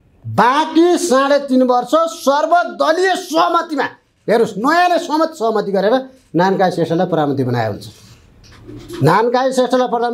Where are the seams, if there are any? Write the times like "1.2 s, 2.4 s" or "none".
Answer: none